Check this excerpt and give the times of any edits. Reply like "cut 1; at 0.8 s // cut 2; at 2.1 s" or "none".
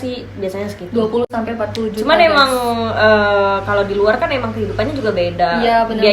none